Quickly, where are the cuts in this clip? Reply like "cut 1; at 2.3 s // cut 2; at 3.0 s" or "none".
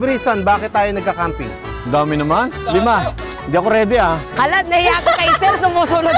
none